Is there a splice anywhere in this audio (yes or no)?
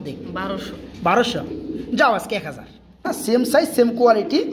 yes